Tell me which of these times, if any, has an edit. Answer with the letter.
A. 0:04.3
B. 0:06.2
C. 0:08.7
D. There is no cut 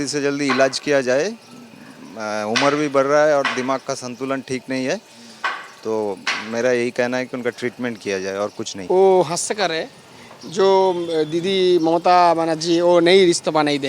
C